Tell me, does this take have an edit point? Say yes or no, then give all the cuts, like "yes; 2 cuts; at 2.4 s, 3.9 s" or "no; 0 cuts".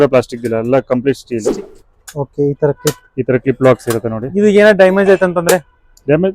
yes; 1 cut; at 1.5 s